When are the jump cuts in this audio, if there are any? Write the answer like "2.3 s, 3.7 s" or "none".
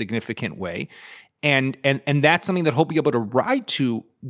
none